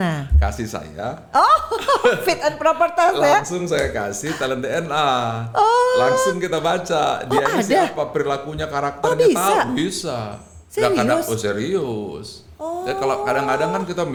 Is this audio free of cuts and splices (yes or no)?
yes